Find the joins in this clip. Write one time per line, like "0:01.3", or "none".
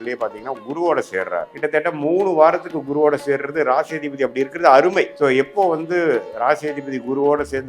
0:01.5
0:05.1